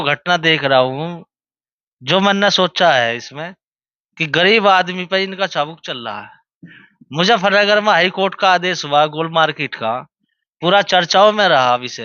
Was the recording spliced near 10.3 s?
no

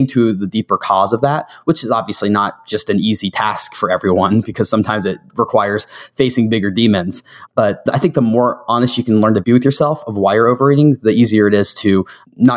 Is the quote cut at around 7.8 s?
yes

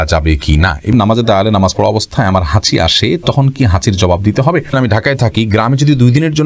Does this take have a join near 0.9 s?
yes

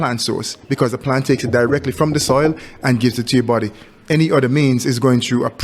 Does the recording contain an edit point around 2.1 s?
no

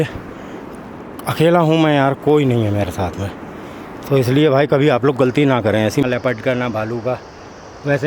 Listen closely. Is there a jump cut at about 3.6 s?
no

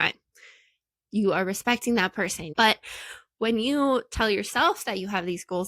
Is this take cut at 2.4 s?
yes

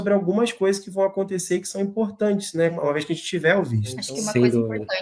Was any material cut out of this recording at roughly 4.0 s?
yes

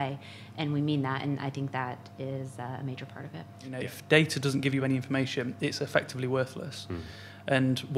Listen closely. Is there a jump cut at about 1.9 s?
no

